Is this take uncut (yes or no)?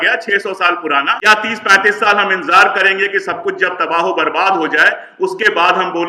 no